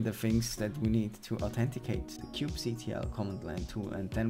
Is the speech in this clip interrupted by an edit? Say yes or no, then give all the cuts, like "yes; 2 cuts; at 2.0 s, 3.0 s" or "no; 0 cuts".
no; 0 cuts